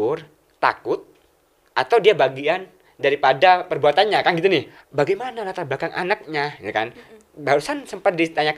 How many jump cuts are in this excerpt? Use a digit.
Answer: 1